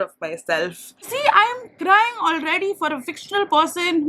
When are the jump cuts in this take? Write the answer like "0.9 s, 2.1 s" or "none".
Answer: 1.1 s

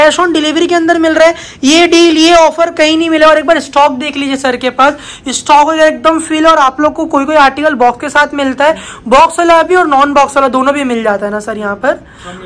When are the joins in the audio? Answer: none

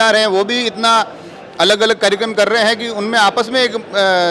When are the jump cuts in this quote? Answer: none

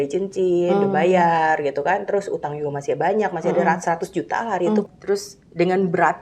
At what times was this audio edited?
4.8 s

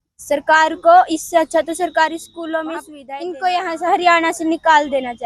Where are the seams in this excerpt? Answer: 3.0 s

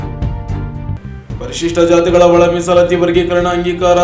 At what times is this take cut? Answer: 1.1 s

